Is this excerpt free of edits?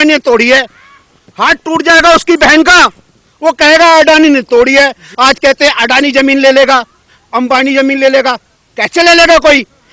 no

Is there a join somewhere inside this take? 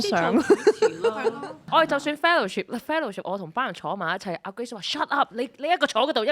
yes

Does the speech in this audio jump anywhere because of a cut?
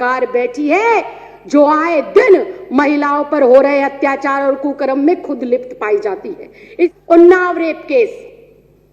yes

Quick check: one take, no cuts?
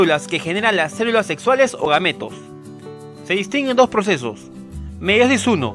yes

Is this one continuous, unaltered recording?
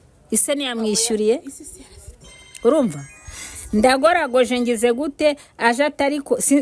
yes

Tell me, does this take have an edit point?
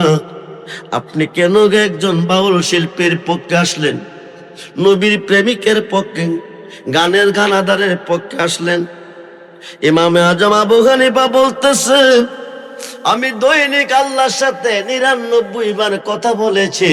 no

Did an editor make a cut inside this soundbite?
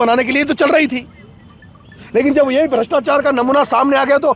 no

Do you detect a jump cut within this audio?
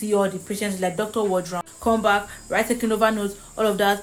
no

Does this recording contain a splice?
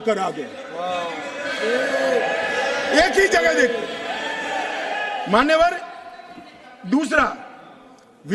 no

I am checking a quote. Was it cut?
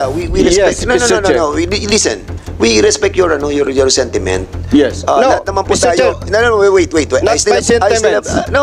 no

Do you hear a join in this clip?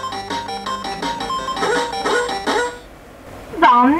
no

